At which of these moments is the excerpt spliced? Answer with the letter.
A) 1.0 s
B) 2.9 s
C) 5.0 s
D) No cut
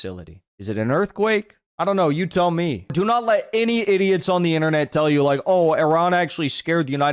B